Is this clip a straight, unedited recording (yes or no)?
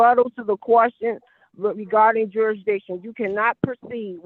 yes